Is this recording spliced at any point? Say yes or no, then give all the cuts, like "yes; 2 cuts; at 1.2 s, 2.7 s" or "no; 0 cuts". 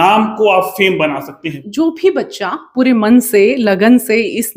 yes; 1 cut; at 1.6 s